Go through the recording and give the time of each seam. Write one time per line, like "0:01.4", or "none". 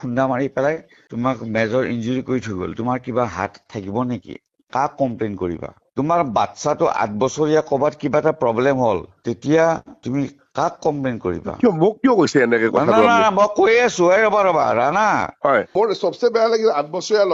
0:01.0
0:09.1
0:15.7